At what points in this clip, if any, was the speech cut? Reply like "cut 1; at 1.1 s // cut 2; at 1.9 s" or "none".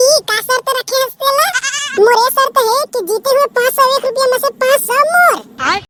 none